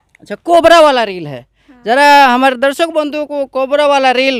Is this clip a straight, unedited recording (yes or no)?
yes